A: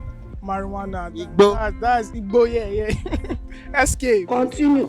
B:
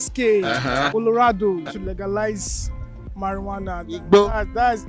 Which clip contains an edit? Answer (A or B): B